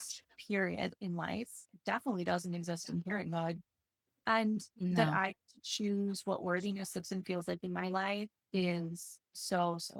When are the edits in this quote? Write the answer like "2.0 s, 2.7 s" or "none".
none